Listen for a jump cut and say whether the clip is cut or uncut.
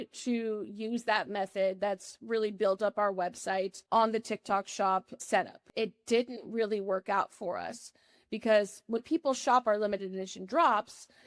cut